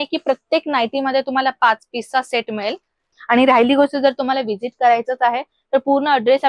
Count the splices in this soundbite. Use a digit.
1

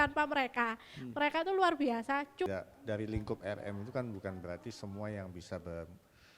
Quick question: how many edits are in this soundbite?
1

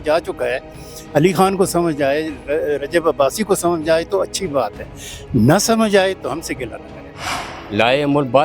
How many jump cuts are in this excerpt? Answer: 1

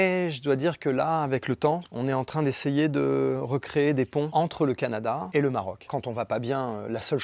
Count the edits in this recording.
2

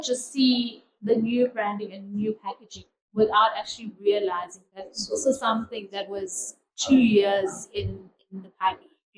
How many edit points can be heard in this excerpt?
0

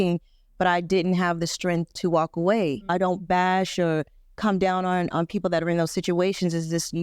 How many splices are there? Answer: 1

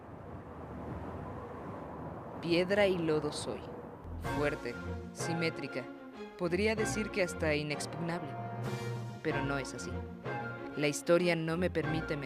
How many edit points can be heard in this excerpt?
1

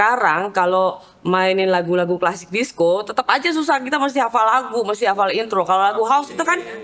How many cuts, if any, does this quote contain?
0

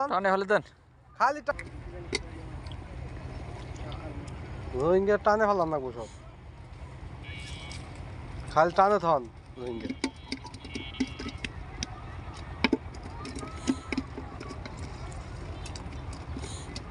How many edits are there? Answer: 1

